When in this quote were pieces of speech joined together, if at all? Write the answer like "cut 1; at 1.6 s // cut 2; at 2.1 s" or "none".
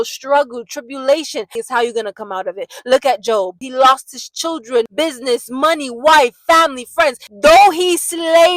cut 1; at 1.6 s // cut 2; at 3.7 s // cut 3; at 4.9 s // cut 4; at 7.3 s